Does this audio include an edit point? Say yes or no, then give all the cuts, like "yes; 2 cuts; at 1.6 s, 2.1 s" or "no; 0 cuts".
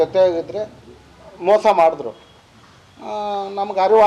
no; 0 cuts